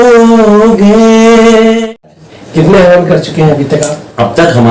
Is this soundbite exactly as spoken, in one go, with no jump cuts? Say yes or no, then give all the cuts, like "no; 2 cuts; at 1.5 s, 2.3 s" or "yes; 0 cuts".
no; 1 cut; at 1.9 s